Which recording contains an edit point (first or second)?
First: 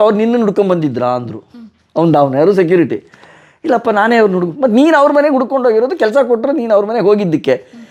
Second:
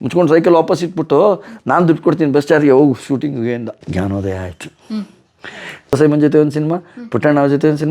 second